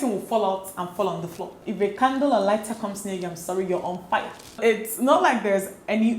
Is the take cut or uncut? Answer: cut